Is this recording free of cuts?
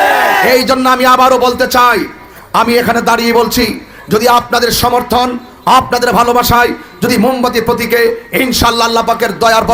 yes; 0 cuts

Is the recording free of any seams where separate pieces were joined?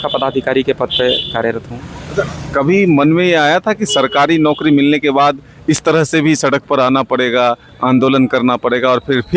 yes; 0 cuts

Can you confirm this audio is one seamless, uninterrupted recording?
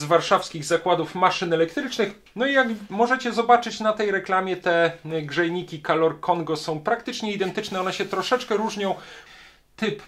no; 2 cuts; at 2.2 s, 9.1 s

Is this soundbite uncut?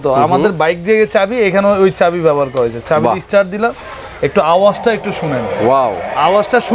yes; 0 cuts

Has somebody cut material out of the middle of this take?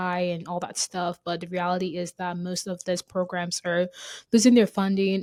no; 0 cuts

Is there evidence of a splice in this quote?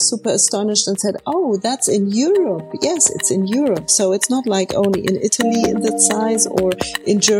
no; 0 cuts

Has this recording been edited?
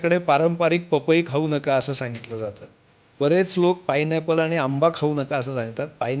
no; 0 cuts

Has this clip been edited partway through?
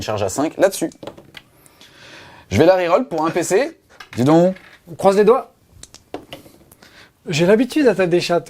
yes; 1 cut; at 7.1 s

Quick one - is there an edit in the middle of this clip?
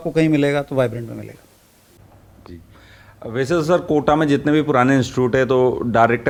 no; 0 cuts

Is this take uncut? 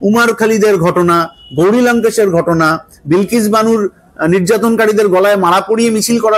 yes; 0 cuts

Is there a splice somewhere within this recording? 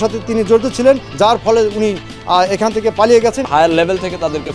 yes; 2 cuts; at 1.1 s, 3.4 s

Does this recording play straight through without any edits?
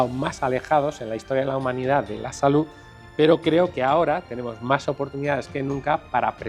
yes; 0 cuts

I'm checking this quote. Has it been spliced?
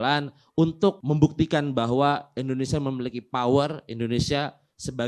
yes; 1 cut; at 1.0 s

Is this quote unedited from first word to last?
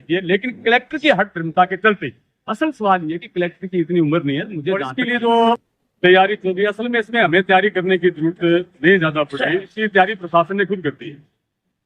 no; 1 cut; at 4.9 s

